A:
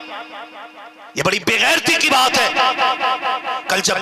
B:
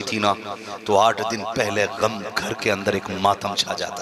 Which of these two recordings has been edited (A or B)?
A